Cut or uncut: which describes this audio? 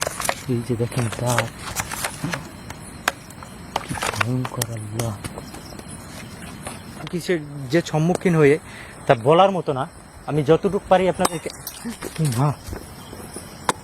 cut